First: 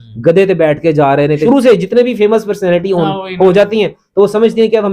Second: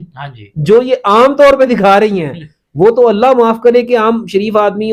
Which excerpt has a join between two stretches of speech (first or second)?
first